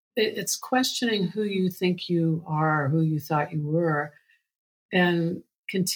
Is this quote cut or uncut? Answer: uncut